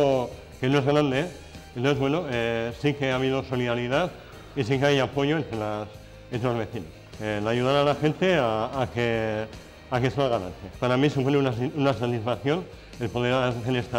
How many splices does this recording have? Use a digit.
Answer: 2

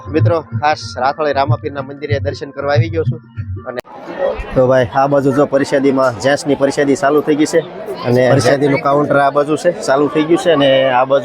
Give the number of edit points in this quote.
2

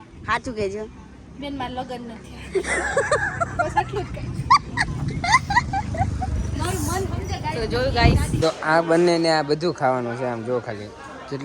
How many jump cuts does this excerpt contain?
1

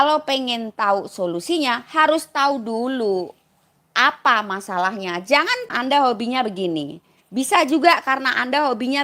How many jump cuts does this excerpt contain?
1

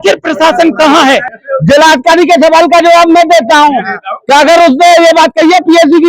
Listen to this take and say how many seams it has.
1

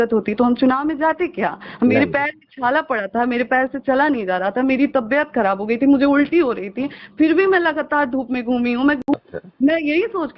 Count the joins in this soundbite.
1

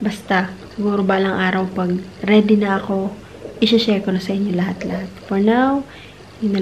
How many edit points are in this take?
0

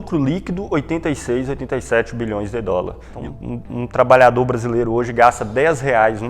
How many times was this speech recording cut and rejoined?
1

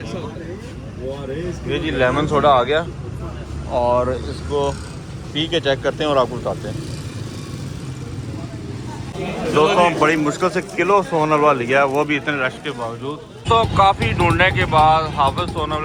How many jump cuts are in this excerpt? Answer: 2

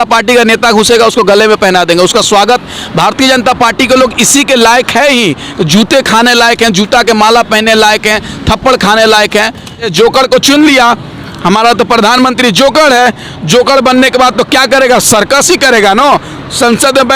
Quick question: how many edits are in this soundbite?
1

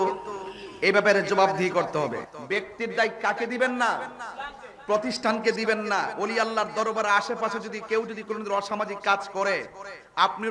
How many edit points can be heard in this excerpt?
1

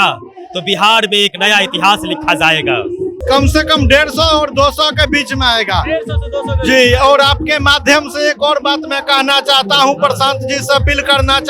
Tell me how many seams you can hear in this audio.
1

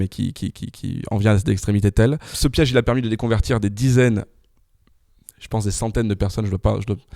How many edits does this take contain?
1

